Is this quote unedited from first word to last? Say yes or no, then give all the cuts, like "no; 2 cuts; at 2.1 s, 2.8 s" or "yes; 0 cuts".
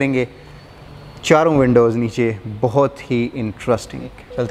yes; 0 cuts